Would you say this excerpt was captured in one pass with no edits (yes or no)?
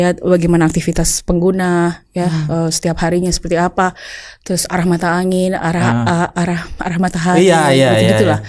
yes